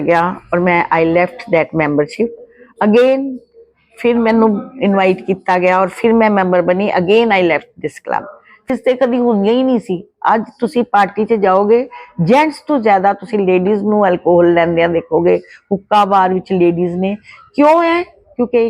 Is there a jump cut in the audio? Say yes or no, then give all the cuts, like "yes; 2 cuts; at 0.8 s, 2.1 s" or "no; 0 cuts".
yes; 1 cut; at 8.7 s